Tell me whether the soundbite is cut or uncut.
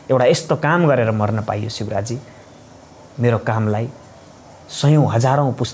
uncut